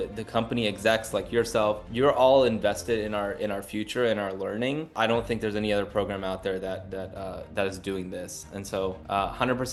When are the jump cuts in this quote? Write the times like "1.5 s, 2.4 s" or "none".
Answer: none